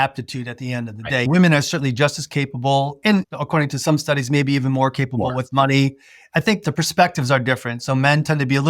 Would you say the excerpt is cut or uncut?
cut